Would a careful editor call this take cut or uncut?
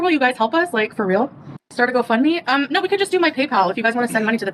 uncut